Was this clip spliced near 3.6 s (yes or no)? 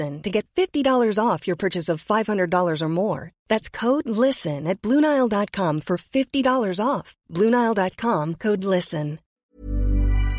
no